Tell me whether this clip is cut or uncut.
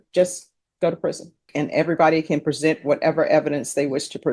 cut